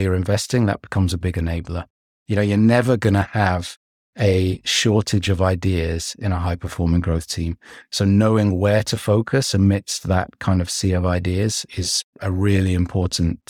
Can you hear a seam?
yes; 1 cut; at 11.7 s

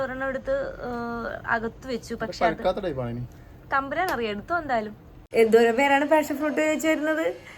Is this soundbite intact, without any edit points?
no; 1 cut; at 5.1 s

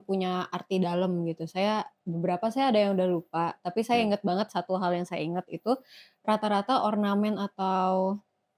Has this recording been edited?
no; 0 cuts

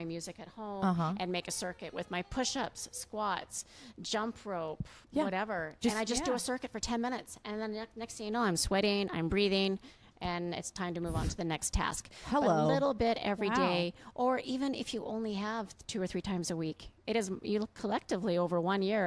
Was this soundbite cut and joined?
no; 0 cuts

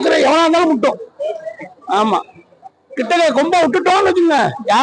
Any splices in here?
no; 0 cuts

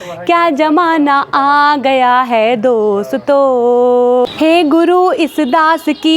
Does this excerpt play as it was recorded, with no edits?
no; 1 cut; at 4.3 s

